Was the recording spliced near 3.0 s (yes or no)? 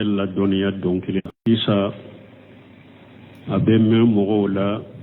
no